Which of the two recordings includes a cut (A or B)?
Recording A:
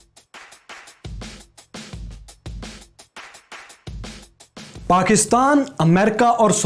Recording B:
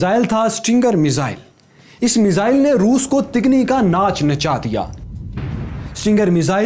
A